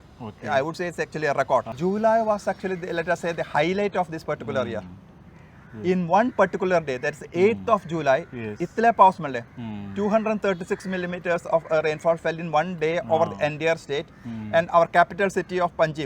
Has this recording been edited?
yes; 1 cut; at 1.7 s

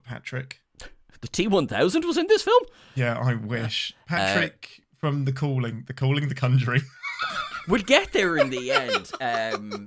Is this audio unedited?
no; 1 cut; at 1.2 s

